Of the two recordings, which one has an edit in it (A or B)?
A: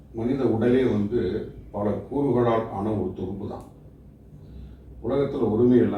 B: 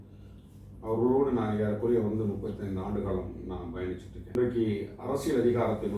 B